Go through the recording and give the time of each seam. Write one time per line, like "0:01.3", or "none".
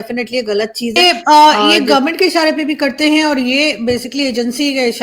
0:01.0